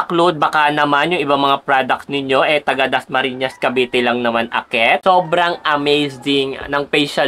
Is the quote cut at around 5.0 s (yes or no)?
yes